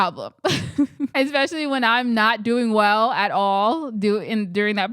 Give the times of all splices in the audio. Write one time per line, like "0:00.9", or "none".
0:01.1